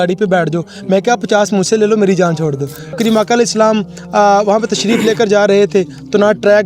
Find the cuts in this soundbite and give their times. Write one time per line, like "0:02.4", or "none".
0:03.0